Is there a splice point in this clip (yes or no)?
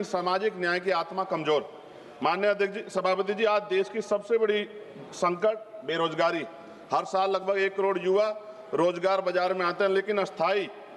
no